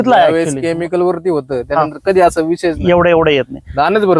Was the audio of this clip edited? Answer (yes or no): no